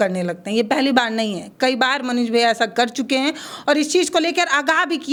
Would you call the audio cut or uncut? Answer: uncut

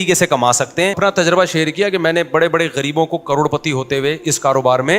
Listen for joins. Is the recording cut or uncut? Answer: cut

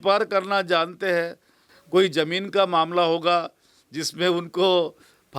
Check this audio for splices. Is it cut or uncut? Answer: cut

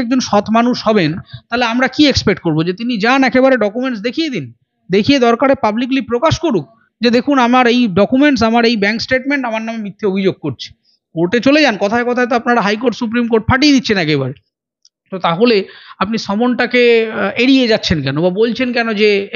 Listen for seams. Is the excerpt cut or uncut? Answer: uncut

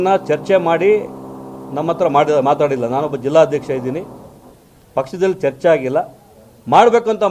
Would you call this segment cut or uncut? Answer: uncut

